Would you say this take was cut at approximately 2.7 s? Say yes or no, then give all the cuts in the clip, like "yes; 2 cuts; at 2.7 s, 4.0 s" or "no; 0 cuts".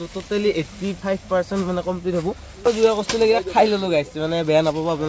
yes; 1 cut; at 2.7 s